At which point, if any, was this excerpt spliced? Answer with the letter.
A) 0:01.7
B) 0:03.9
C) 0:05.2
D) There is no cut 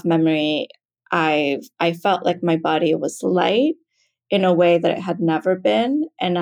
D